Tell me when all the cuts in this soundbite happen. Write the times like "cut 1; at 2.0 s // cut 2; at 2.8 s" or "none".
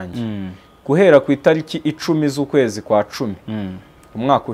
none